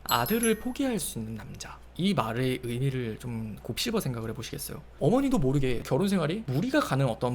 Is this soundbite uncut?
no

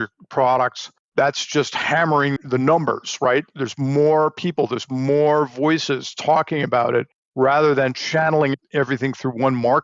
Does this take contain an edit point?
yes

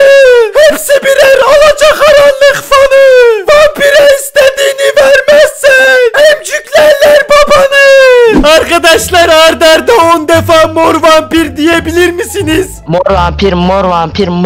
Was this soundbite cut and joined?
yes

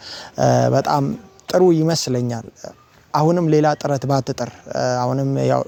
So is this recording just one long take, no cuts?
yes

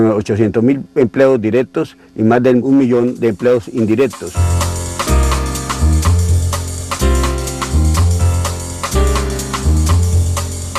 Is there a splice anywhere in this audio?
yes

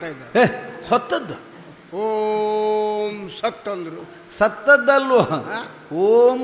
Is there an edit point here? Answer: no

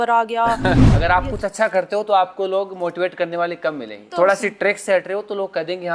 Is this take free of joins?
no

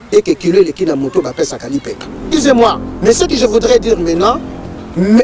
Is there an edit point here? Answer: yes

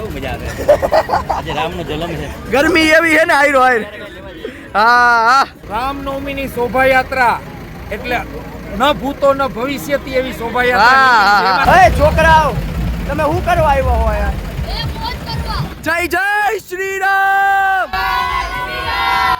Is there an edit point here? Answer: yes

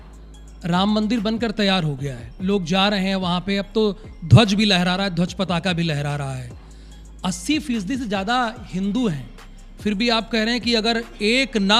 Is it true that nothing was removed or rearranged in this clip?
yes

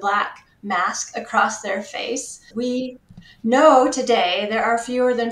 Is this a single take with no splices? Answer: no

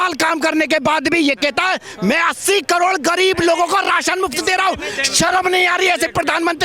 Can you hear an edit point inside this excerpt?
no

